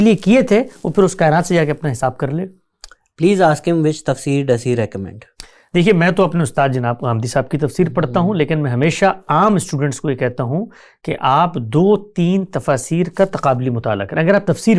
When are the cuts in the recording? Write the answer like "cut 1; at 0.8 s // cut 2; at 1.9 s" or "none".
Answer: none